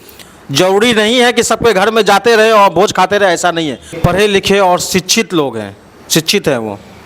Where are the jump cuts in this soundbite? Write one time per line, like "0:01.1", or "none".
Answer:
0:03.9